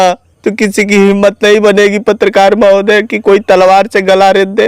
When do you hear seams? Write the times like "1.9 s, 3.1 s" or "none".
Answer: none